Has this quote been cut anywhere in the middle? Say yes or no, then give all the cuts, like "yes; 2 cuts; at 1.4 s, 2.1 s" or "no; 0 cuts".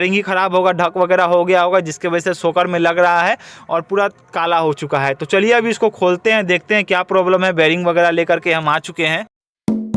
no; 0 cuts